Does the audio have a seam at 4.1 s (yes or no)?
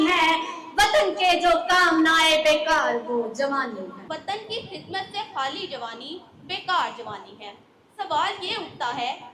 yes